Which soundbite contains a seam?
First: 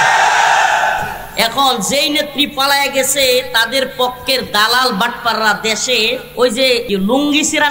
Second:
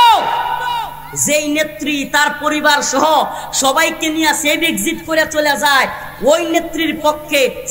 first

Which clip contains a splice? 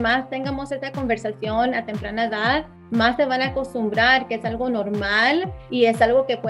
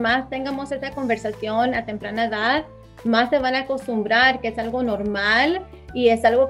first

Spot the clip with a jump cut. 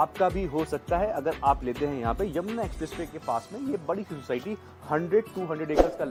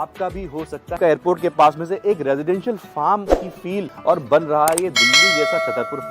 second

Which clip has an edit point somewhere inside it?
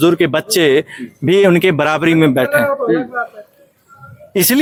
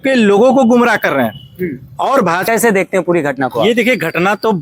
second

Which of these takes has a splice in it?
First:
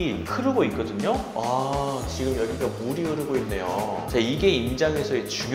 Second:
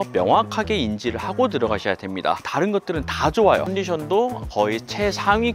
second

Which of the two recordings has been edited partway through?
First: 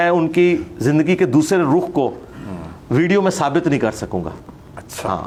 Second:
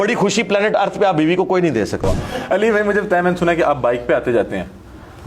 second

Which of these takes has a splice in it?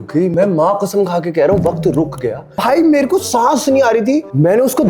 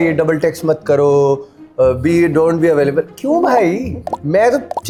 first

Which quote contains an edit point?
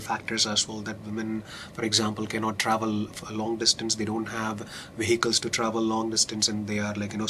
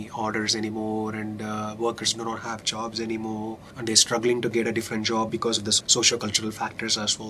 second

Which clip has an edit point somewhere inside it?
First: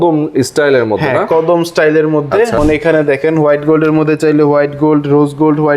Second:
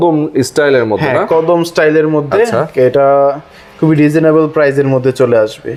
first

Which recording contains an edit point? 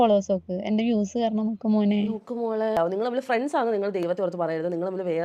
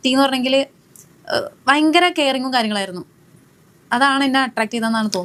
first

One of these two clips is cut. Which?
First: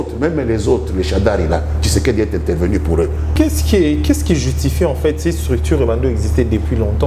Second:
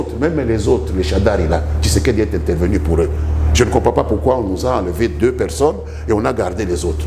first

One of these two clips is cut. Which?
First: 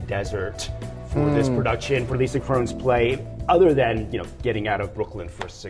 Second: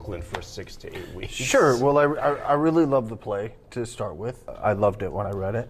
second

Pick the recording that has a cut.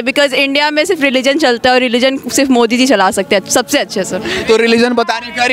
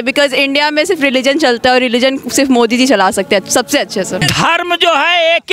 second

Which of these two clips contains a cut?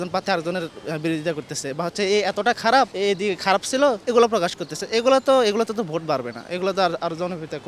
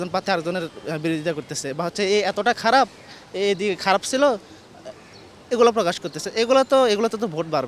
first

